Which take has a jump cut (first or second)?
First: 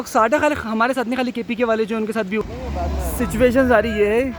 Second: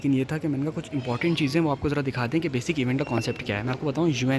first